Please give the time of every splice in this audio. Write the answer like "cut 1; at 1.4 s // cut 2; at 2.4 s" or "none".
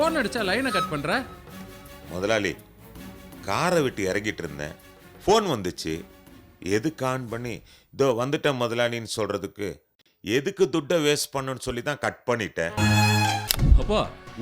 cut 1; at 13.4 s